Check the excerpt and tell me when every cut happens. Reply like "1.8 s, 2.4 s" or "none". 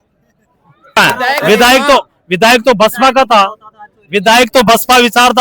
1.0 s